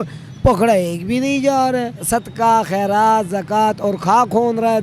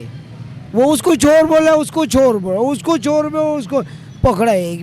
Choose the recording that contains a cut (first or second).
first